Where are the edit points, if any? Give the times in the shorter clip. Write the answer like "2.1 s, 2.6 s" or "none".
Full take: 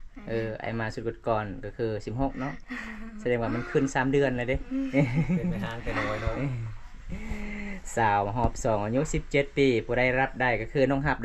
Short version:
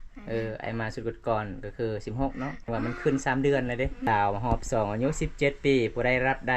2.7 s, 4.1 s